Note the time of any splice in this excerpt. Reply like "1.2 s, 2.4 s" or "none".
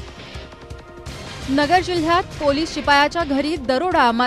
1.4 s